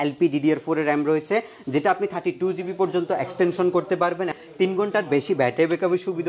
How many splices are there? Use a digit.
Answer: 1